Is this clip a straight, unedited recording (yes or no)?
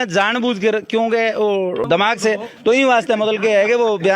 yes